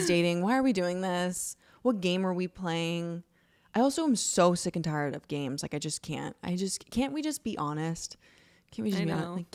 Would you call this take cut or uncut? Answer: uncut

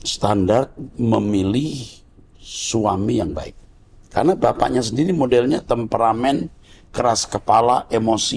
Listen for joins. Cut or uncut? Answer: uncut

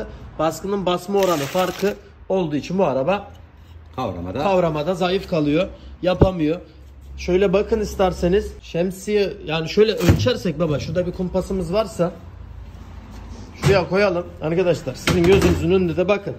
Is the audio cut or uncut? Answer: uncut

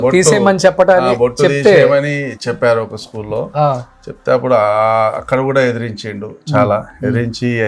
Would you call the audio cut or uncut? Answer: uncut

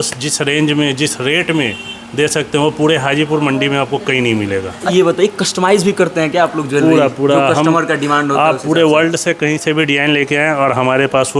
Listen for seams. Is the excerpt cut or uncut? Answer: cut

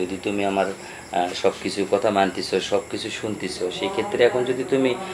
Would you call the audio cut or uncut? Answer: uncut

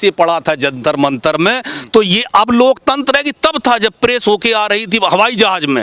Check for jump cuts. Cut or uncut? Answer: uncut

